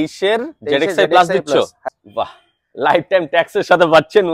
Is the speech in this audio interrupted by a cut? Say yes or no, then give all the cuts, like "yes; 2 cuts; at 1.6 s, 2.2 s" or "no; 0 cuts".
yes; 1 cut; at 1.8 s